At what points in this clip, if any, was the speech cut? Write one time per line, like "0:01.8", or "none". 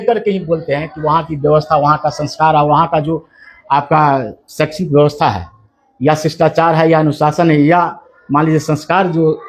none